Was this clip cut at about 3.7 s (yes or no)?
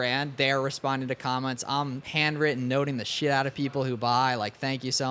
no